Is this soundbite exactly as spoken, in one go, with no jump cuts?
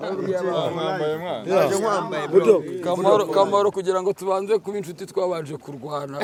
yes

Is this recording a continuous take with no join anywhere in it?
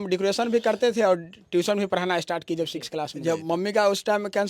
no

